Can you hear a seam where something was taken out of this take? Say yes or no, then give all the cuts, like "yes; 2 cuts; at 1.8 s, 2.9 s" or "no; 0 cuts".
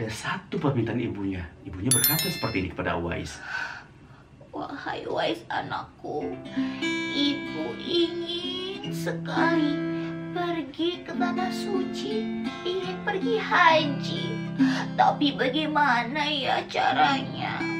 no; 0 cuts